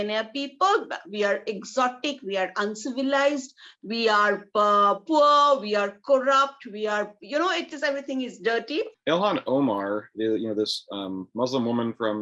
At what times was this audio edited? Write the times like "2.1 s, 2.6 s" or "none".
8.9 s